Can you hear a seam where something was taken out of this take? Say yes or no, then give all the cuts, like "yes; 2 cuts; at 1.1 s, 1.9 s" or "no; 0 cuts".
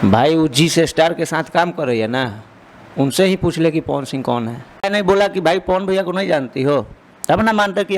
yes; 1 cut; at 4.9 s